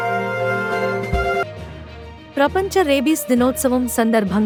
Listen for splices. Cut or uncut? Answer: uncut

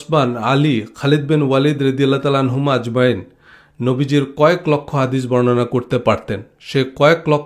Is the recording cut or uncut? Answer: uncut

